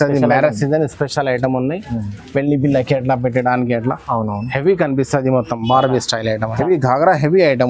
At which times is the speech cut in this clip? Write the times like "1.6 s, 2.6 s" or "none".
6.5 s

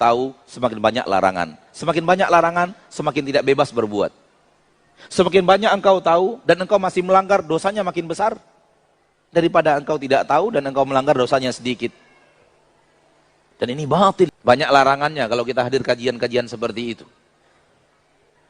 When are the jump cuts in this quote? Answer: 14.1 s

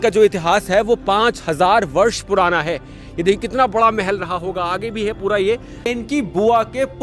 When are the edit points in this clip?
5.9 s

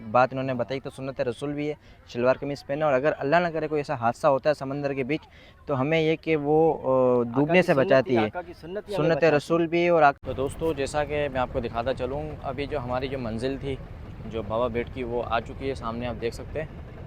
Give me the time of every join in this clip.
10.2 s

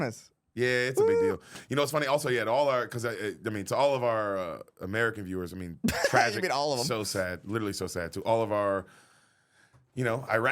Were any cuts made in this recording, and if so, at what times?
none

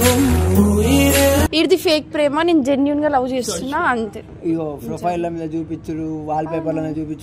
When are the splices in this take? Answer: 1.5 s

